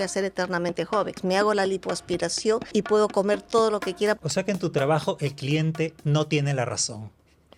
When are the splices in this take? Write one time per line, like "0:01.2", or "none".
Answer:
0:01.2
0:02.7
0:04.2